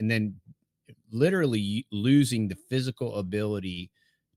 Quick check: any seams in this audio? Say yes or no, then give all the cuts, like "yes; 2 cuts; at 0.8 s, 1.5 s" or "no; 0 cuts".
no; 0 cuts